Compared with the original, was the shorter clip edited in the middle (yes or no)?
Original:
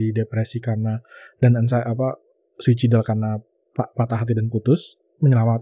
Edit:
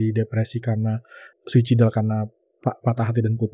yes